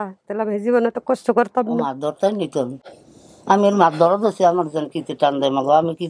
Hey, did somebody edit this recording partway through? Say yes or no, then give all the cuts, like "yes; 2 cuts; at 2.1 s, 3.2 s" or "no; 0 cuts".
no; 0 cuts